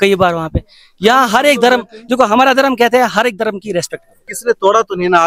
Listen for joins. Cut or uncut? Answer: cut